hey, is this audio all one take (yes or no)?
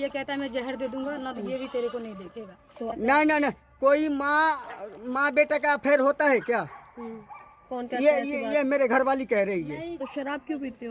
no